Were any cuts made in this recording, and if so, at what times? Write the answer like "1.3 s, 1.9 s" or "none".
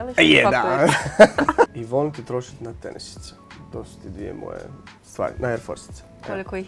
1.8 s